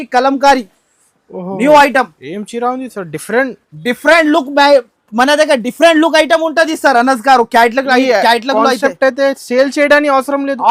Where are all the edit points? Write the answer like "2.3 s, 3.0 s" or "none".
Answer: none